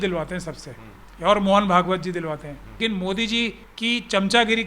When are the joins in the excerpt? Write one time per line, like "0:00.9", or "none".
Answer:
0:02.8
0:03.7